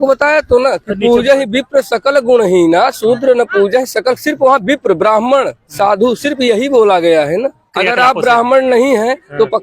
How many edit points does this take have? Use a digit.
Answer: 1